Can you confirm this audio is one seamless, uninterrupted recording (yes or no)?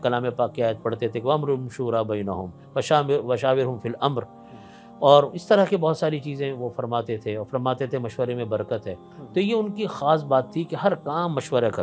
yes